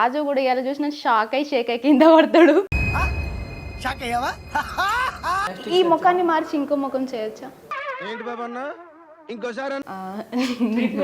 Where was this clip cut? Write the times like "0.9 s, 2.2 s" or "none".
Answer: 5.5 s, 9.9 s